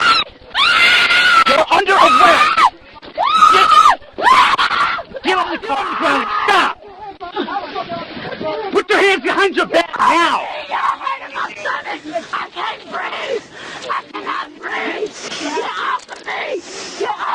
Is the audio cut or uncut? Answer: cut